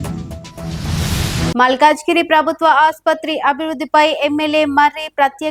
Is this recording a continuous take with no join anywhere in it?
yes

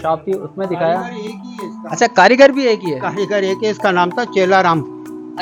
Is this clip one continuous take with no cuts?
yes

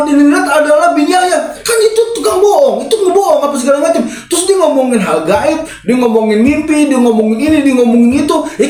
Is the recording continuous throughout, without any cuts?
yes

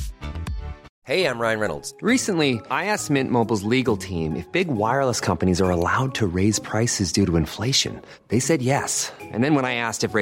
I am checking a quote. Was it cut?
yes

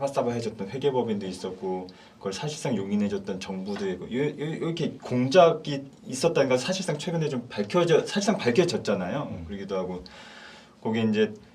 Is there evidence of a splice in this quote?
no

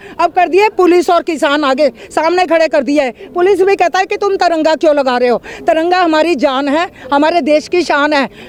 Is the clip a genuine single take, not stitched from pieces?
yes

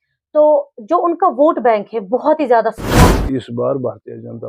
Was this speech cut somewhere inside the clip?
yes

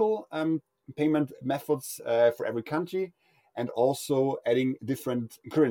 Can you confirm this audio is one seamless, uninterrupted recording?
no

